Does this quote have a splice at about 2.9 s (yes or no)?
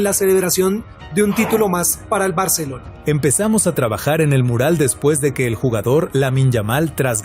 yes